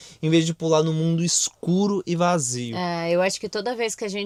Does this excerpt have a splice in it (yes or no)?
no